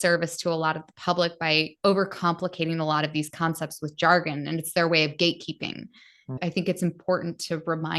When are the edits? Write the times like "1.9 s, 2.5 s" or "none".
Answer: 6.3 s